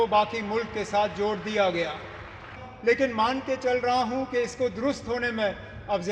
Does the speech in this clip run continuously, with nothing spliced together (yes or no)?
no